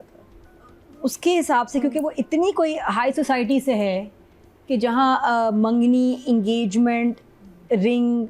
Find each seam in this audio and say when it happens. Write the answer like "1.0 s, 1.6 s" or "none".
none